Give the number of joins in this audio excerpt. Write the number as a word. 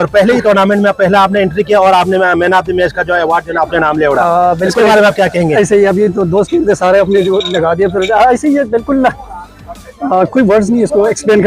zero